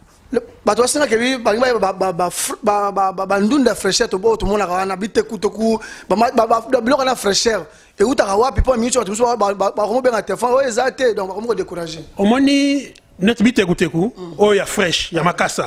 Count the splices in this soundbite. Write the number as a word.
zero